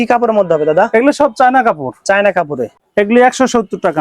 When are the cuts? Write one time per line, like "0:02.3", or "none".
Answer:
0:02.7